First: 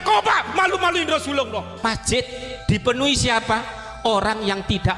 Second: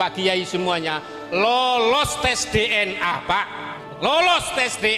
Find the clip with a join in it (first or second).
first